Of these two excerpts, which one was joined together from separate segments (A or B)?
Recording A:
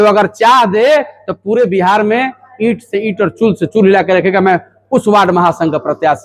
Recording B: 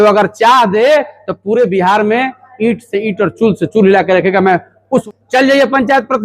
B